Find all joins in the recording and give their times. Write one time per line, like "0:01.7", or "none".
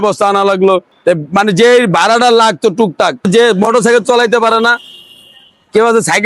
0:03.3